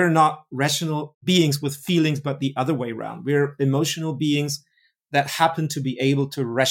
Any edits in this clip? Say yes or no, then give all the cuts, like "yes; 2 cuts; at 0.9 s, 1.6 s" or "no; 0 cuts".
no; 0 cuts